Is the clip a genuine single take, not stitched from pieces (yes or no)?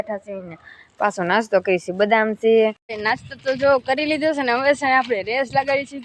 no